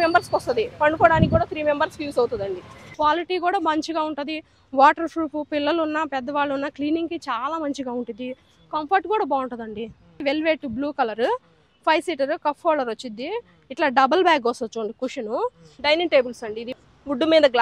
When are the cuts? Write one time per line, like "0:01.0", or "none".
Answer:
0:02.8
0:10.2
0:15.7